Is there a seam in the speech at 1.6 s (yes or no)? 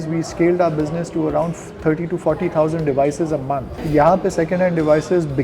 no